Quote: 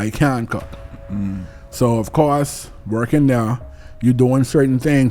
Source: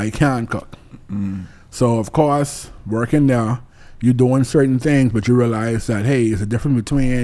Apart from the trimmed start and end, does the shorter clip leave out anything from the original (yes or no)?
no